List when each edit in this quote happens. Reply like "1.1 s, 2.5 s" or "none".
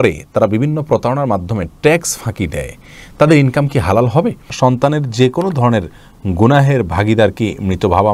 4.5 s